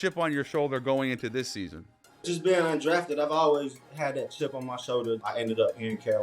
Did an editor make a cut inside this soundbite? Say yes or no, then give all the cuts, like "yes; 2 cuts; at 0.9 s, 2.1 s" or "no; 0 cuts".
yes; 2 cuts; at 2.3 s, 5.2 s